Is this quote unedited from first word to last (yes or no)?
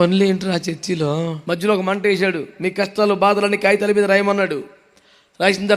no